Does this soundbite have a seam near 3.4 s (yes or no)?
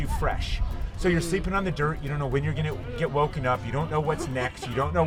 no